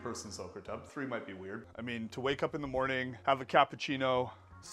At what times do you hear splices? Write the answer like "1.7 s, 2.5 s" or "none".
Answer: 1.6 s, 3.1 s